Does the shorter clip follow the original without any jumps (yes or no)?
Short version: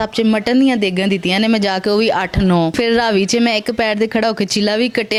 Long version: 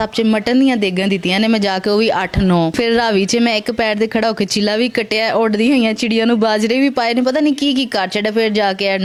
yes